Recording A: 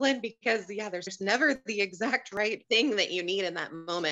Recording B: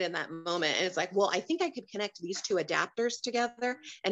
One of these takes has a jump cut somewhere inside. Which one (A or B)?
A